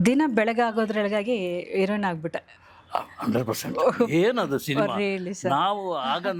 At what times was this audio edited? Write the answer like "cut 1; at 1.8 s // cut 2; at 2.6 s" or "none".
none